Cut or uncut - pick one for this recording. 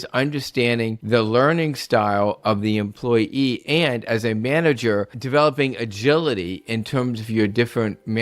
cut